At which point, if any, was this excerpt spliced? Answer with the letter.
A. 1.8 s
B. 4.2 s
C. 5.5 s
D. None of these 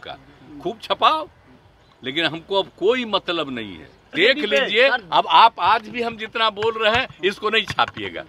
B